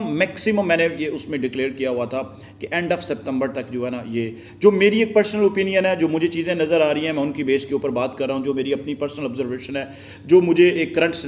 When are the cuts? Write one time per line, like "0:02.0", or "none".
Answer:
none